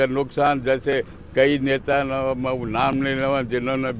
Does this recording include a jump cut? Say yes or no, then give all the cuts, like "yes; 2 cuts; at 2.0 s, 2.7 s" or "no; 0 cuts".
no; 0 cuts